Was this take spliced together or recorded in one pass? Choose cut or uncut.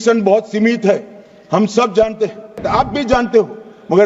cut